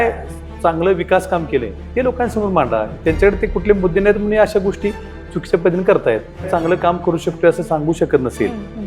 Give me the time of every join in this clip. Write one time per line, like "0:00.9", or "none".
0:06.5